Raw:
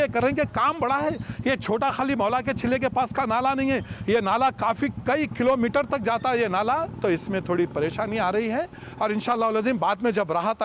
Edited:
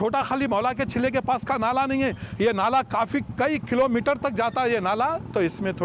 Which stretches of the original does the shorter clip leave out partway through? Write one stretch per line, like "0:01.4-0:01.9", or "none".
none